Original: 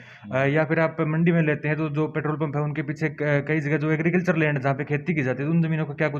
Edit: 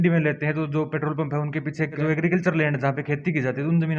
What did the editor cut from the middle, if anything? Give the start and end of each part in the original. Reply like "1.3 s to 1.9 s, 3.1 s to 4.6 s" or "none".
3.2 s to 3.8 s